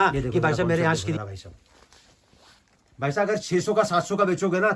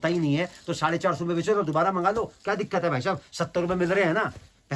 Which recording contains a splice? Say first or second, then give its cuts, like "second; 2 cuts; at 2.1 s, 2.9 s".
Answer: first; 1 cut; at 1.2 s